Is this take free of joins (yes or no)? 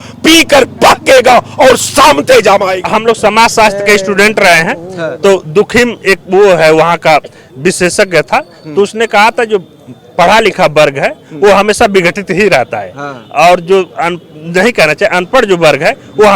no